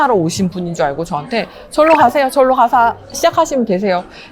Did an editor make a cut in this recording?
no; 0 cuts

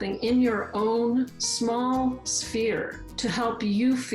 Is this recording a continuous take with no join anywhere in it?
no; 2 cuts; at 1.4 s, 3.0 s

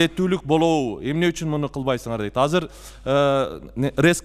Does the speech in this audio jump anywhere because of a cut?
no; 0 cuts

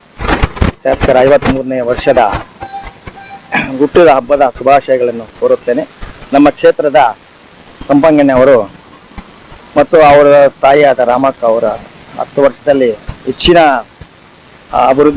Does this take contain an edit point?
no; 0 cuts

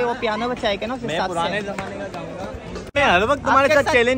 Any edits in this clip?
yes; 1 cut; at 2.9 s

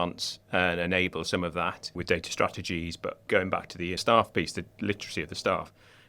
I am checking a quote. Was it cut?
yes; 2 cuts; at 2.0 s, 3.6 s

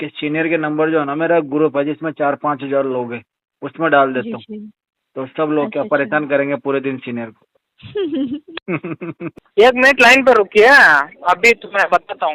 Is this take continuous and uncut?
no; 1 cut; at 9.4 s

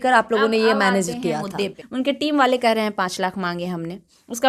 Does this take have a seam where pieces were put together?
yes; 1 cut; at 1.8 s

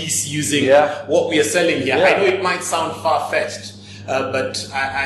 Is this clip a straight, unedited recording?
yes; 0 cuts

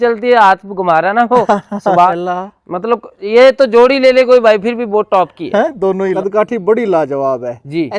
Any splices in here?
yes; 2 cuts; at 2.1 s, 6.2 s

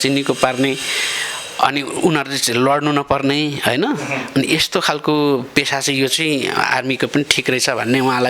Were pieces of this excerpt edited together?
no; 0 cuts

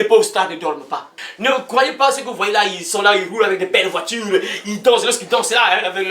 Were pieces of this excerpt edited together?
yes; 1 cut; at 1.2 s

